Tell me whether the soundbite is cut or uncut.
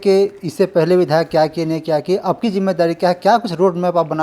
uncut